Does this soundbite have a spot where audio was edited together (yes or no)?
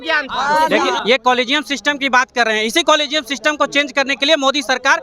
yes